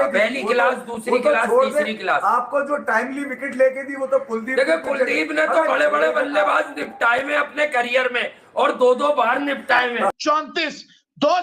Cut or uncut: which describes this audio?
cut